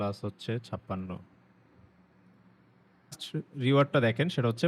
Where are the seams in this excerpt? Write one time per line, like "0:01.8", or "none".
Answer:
0:03.2